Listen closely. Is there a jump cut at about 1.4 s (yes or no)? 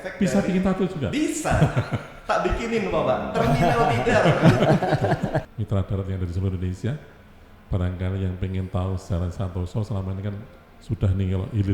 no